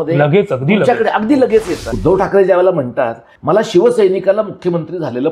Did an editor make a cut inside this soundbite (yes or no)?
yes